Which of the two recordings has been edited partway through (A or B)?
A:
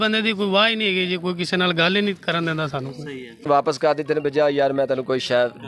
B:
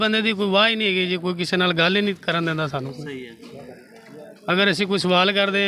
A